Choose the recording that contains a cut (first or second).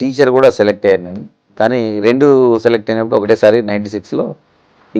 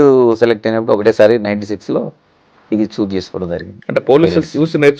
second